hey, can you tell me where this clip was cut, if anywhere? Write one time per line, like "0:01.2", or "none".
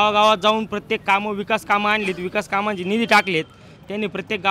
none